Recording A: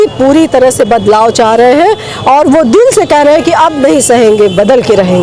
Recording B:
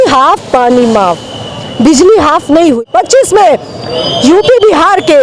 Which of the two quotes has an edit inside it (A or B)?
B